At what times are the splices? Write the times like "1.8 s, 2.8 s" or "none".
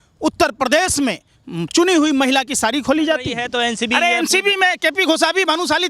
3.4 s